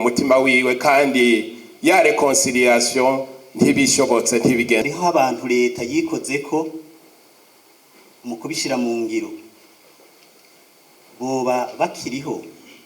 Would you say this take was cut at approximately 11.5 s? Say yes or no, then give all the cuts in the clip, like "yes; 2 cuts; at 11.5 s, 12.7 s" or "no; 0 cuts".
no; 1 cut; at 4.8 s